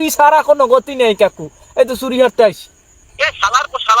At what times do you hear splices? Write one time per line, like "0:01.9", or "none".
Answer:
0:03.0